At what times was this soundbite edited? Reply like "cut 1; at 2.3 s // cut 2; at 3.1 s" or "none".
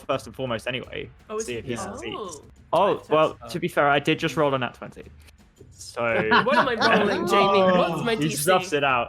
cut 1; at 2.5 s